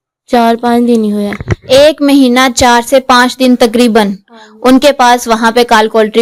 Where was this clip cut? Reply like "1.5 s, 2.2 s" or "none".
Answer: none